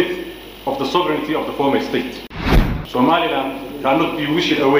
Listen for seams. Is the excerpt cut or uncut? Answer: cut